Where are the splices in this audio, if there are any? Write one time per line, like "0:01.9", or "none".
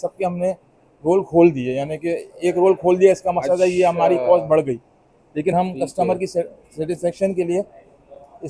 none